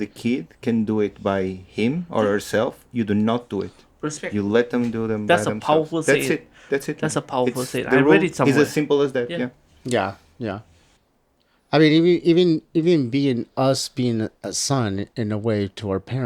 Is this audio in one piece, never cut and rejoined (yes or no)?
yes